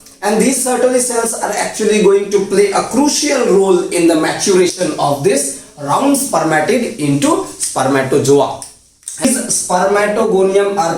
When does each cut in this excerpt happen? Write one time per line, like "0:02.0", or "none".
0:09.2